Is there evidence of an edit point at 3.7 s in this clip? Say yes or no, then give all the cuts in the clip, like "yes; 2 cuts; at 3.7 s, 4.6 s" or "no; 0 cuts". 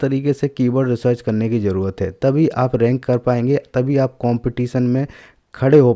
no; 0 cuts